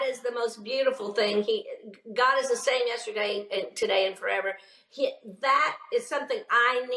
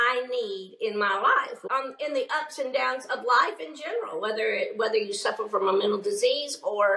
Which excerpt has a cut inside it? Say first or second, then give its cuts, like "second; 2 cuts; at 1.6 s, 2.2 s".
second; 1 cut; at 1.6 s